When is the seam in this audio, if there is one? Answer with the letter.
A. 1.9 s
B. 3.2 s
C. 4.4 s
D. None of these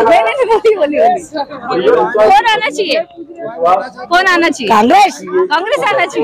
A